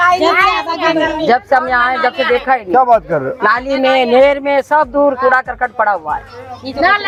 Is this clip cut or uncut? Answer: uncut